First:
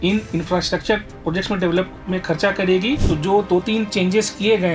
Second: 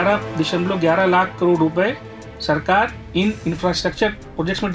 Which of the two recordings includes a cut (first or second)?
first